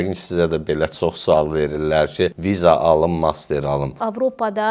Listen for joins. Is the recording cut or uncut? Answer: cut